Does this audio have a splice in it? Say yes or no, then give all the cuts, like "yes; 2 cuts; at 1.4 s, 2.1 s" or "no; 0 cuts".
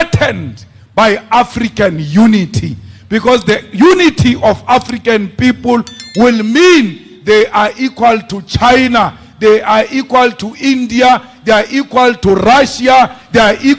no; 0 cuts